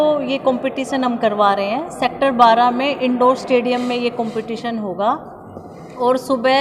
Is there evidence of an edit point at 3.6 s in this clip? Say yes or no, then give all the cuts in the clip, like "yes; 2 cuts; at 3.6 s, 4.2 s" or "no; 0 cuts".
no; 0 cuts